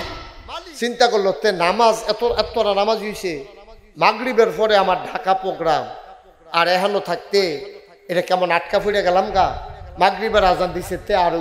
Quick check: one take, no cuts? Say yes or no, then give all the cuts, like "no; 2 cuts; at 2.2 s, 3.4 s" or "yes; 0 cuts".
yes; 0 cuts